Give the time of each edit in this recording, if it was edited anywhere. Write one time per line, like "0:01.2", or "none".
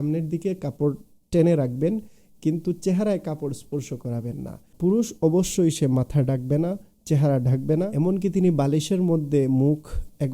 0:04.6
0:07.9